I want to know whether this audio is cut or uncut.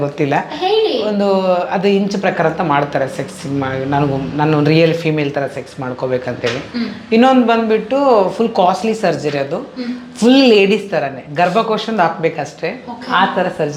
uncut